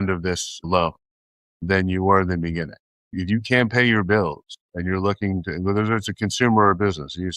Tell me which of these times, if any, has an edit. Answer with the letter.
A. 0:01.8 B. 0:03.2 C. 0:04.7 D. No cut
B